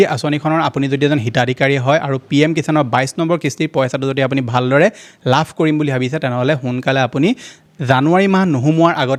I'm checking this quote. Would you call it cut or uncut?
uncut